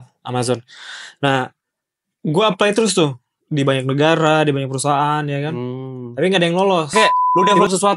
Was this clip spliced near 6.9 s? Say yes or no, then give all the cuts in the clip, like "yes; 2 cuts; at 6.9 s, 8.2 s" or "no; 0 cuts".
yes; 1 cut; at 6.9 s